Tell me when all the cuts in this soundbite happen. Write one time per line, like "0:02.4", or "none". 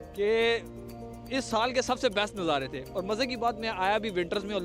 none